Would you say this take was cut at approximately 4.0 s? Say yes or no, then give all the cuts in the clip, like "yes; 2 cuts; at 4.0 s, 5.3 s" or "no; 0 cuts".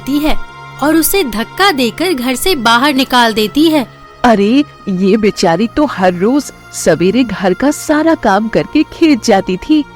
yes; 1 cut; at 4.0 s